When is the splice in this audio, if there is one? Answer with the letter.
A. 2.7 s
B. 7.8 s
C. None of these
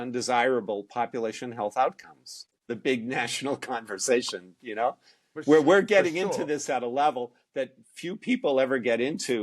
A